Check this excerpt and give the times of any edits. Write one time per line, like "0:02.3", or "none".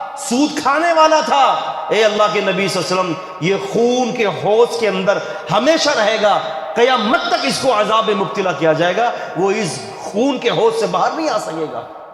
none

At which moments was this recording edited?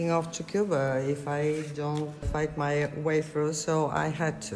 0:02.3

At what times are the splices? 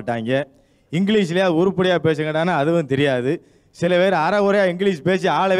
none

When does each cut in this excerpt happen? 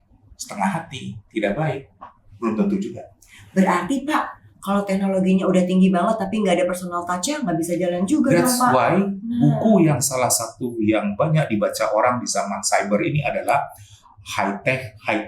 none

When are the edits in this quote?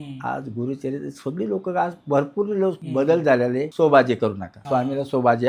0:02.8
0:03.7
0:04.5

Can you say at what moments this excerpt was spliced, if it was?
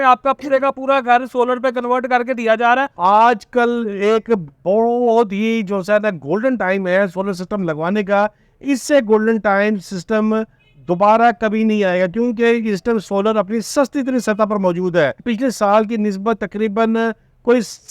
0:02.9
0:15.2

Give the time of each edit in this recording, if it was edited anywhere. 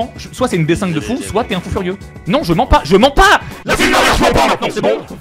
none

